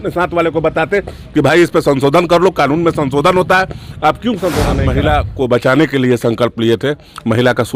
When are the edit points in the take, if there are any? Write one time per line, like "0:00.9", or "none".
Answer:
0:04.8

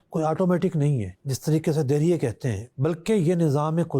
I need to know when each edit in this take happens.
0:01.2

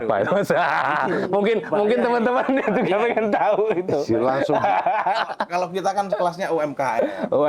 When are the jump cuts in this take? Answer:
none

